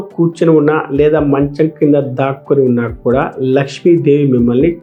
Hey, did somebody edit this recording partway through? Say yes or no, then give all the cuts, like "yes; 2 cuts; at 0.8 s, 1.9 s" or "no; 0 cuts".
no; 0 cuts